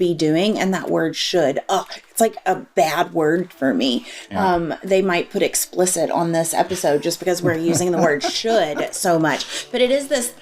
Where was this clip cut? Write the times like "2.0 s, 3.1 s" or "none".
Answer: 2.7 s